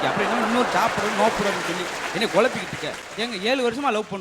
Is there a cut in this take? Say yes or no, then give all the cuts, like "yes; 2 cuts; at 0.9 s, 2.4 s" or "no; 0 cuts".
yes; 1 cut; at 3.2 s